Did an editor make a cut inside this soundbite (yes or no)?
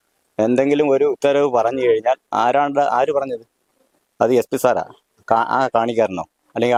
no